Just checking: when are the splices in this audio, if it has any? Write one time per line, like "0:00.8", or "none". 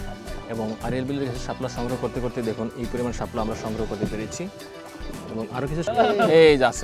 0:05.8